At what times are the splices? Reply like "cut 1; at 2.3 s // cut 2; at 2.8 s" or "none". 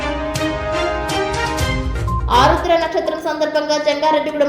cut 1; at 2.2 s